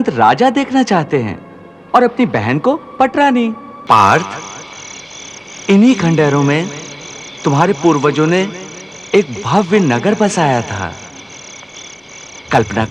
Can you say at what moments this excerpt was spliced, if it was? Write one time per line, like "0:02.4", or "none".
0:03.7